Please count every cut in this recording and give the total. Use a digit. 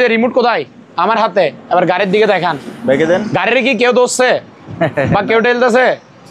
0